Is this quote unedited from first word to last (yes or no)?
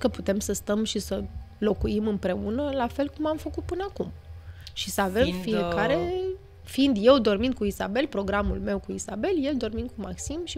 yes